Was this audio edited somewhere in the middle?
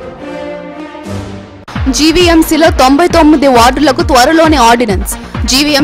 no; 0 cuts

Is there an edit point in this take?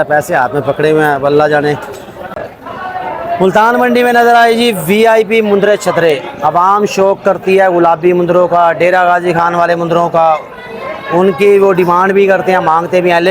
yes; 1 cut; at 2.1 s

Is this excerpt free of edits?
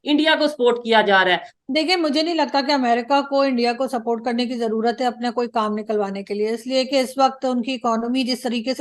no; 1 cut; at 1.5 s

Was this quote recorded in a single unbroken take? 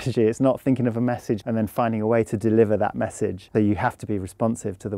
no; 2 cuts; at 1.4 s, 3.4 s

